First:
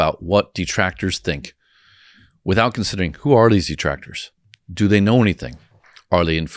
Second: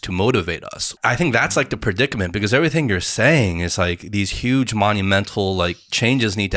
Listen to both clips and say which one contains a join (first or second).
second